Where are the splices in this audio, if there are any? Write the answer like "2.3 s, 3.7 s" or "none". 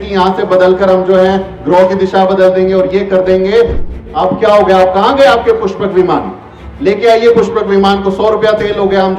4.0 s